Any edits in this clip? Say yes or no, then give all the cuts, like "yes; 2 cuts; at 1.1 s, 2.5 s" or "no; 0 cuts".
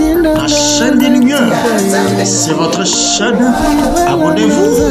no; 0 cuts